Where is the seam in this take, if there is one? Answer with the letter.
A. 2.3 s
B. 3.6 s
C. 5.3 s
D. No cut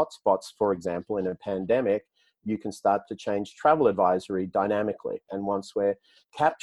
C